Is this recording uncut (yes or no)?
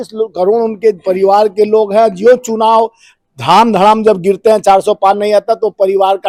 yes